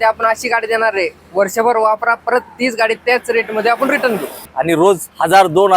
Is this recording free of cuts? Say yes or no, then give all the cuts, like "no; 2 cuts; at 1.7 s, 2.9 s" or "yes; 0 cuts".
no; 1 cut; at 4.5 s